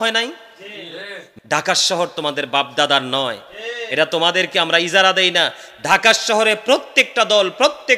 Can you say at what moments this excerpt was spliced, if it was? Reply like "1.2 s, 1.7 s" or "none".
1.3 s